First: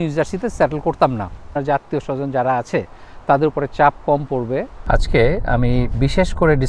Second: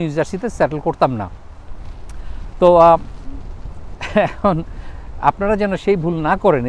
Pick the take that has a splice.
first; 2 cuts; at 1.5 s, 4.7 s

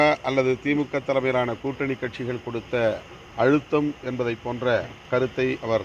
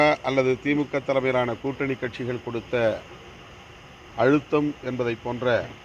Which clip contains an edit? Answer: first; 2 cuts; at 3.2 s, 5.0 s

